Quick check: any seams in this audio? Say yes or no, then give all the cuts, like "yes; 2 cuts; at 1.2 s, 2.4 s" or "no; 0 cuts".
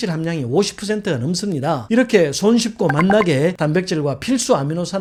no; 0 cuts